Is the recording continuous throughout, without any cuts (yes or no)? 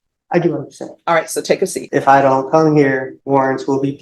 no